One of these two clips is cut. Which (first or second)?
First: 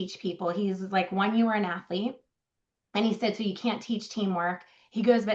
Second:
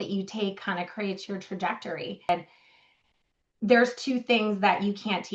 second